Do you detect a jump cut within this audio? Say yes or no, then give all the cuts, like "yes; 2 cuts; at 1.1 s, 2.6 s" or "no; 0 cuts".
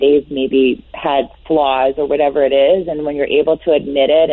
no; 0 cuts